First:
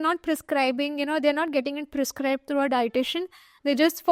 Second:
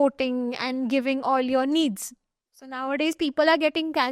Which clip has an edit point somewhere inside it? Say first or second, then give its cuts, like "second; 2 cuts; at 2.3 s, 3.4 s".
second; 1 cut; at 2.5 s